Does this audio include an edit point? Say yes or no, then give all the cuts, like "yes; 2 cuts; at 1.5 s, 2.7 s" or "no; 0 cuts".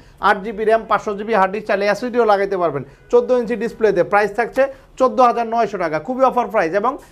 no; 0 cuts